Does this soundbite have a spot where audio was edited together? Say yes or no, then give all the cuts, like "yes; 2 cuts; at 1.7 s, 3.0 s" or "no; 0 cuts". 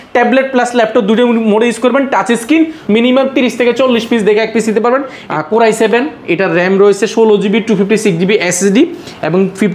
yes; 2 cuts; at 2.8 s, 5.2 s